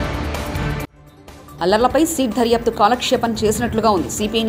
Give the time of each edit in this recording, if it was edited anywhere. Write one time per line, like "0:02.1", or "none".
0:00.9